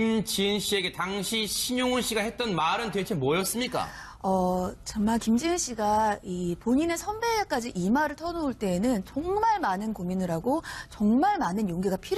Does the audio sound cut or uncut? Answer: uncut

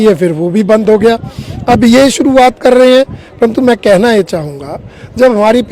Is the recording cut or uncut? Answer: uncut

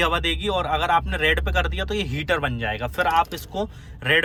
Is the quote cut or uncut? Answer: uncut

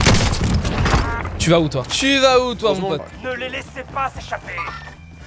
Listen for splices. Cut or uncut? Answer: cut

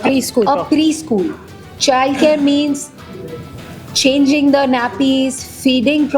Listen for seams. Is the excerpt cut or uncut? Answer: uncut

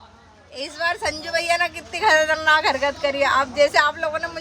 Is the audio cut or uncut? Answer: uncut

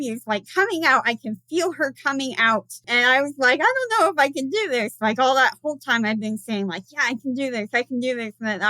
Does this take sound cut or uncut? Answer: cut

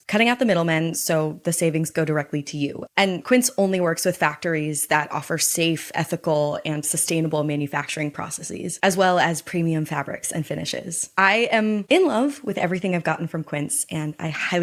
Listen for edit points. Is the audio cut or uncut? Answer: uncut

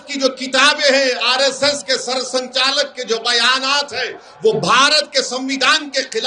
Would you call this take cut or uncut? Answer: uncut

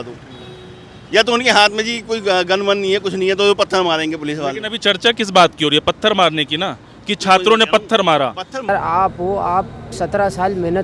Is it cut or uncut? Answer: cut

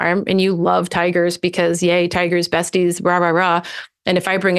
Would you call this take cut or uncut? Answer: uncut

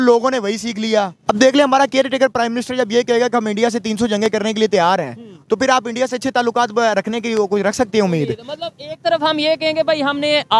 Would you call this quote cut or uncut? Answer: cut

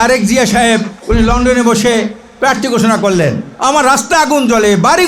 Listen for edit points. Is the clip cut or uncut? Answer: cut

